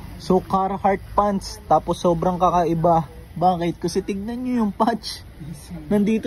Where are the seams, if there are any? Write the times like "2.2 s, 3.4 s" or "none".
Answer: none